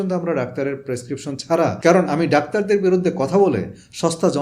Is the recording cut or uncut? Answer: cut